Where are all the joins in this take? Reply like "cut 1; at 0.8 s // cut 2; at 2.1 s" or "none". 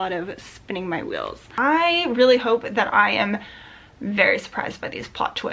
cut 1; at 1.6 s